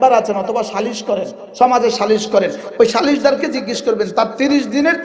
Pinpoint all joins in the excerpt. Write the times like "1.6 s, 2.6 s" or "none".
none